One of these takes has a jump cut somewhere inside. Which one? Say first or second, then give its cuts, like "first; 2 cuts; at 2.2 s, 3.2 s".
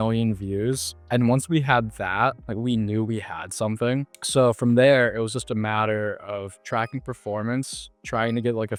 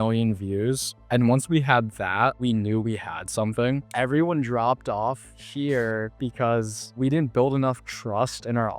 second; 2 cuts; at 2.4 s, 3.9 s